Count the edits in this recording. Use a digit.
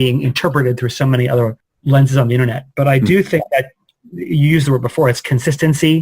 1